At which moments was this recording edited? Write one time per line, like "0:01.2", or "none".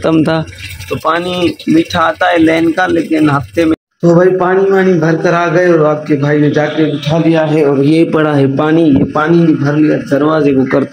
0:03.8

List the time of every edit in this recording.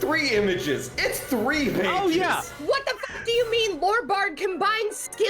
0:02.5

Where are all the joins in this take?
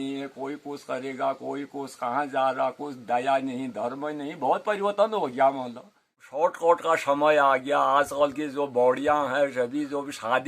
0:06.2

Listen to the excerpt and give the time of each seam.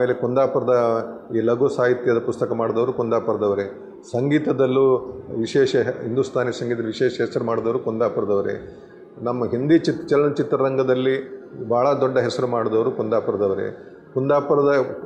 none

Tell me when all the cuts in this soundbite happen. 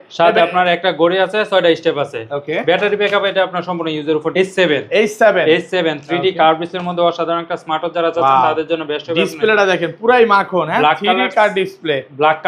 0:04.3

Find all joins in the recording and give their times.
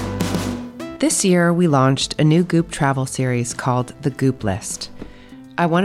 0:00.9

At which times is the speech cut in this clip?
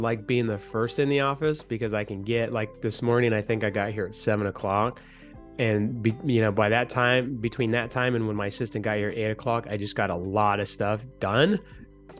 none

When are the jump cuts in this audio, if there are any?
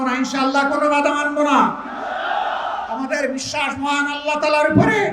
none

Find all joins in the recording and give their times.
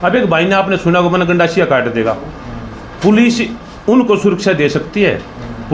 none

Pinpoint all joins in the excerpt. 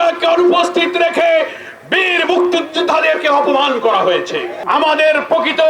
0:04.5

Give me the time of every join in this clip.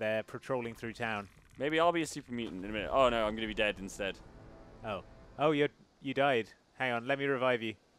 0:01.4
0:05.3

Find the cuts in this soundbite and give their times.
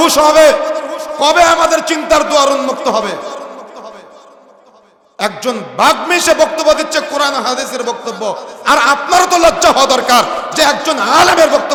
none

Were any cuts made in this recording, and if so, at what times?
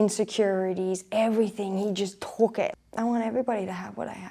0:02.7

